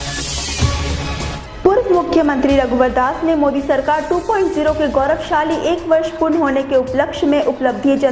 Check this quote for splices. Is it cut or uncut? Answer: cut